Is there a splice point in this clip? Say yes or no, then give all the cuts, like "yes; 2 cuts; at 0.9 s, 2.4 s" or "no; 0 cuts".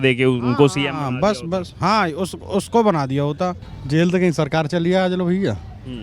yes; 1 cut; at 3.6 s